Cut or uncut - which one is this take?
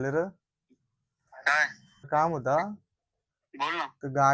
cut